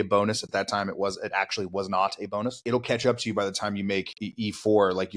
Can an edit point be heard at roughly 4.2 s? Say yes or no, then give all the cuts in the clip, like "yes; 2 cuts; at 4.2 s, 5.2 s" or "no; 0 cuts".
yes; 2 cuts; at 2.6 s, 4.2 s